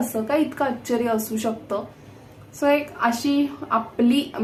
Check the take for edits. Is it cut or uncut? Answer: uncut